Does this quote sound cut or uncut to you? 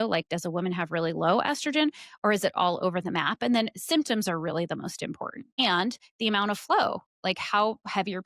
cut